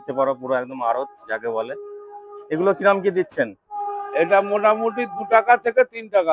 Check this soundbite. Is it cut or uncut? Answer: uncut